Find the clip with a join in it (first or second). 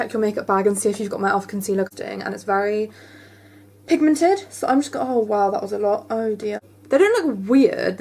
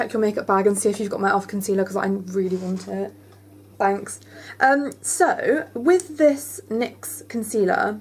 first